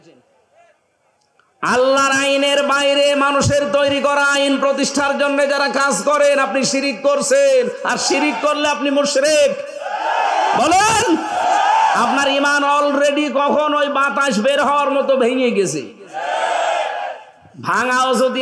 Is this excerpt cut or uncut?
uncut